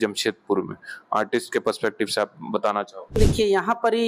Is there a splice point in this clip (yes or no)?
no